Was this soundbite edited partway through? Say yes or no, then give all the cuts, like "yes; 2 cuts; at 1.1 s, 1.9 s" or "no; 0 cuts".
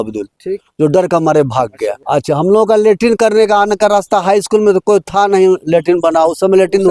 yes; 1 cut; at 1.9 s